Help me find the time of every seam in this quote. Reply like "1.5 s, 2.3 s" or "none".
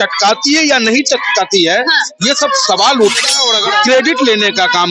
3.5 s